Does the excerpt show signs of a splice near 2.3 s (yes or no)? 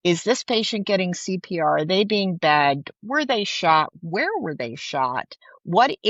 no